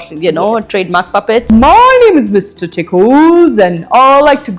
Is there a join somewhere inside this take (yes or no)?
yes